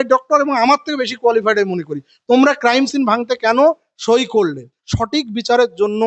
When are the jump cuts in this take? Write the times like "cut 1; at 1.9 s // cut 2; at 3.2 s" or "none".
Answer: cut 1; at 4.8 s